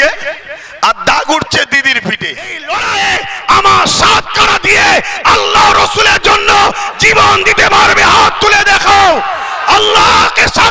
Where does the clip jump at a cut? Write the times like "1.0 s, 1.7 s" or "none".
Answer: 2.6 s